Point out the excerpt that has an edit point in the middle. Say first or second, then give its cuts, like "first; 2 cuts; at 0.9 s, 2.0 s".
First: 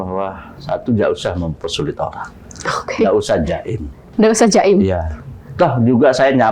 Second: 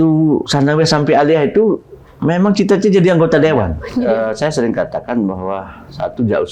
second; 1 cut; at 3.8 s